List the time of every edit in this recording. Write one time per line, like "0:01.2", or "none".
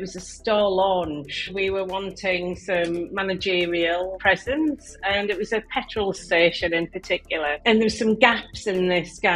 0:01.5
0:04.2
0:07.6